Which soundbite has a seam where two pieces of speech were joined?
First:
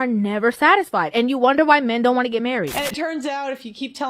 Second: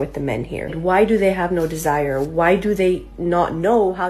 first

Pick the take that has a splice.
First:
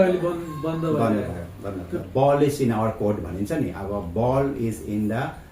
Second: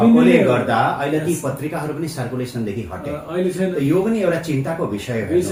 first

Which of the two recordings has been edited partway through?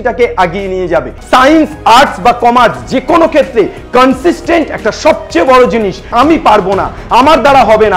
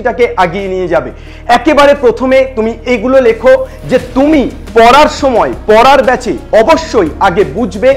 first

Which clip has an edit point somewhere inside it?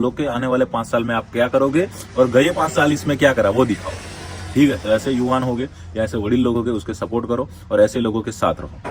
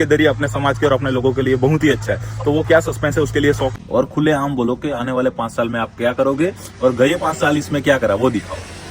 second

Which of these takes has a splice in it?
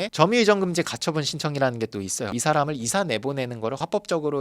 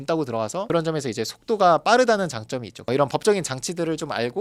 first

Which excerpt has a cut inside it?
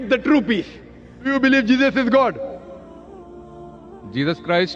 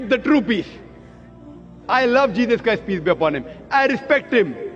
first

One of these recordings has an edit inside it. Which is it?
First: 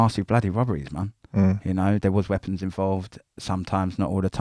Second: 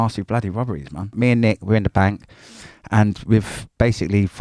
second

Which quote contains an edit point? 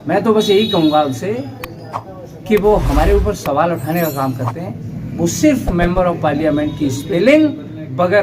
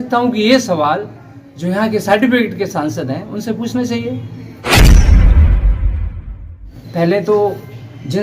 second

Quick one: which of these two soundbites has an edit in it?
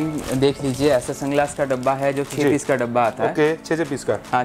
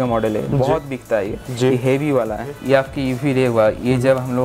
second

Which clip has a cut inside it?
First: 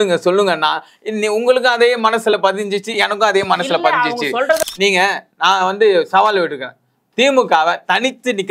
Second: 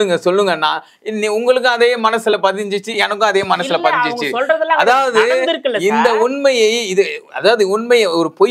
first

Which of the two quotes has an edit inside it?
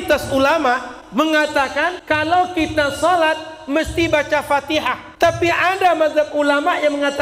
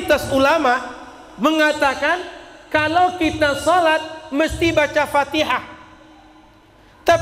first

